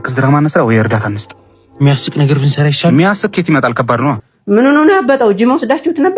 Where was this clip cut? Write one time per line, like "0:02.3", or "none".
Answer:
0:04.3